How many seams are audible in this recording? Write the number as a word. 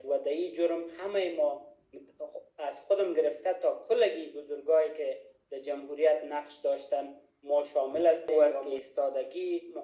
one